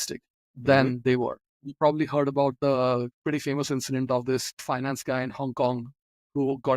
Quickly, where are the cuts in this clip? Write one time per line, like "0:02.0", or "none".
0:03.1
0:04.6